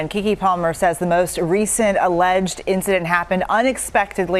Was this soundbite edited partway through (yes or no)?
no